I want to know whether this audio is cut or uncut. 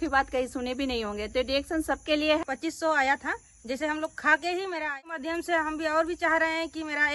cut